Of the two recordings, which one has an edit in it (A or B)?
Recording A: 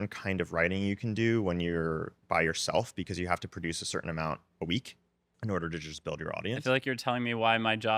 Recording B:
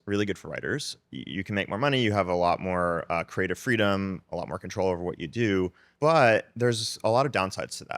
B